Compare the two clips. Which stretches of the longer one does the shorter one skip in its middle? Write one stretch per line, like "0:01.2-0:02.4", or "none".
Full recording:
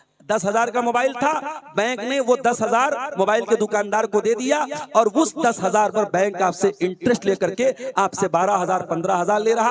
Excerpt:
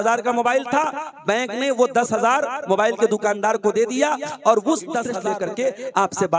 0:05.7-0:07.2